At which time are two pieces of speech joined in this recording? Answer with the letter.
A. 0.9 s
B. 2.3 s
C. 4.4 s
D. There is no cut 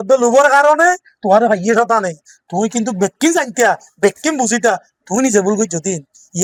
D